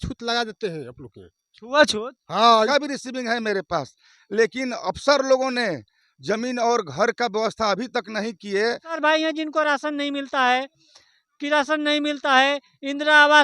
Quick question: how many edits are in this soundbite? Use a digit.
2